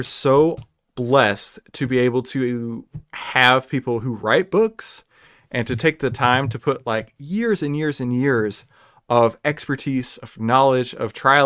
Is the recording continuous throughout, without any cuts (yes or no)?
yes